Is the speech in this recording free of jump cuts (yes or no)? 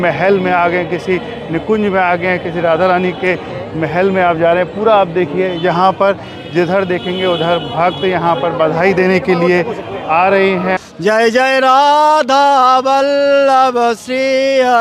no